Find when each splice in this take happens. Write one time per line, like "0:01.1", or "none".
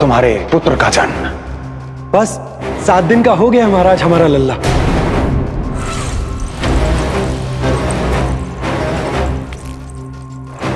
none